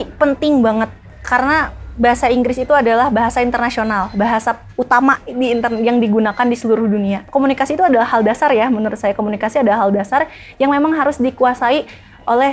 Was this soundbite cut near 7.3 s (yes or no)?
yes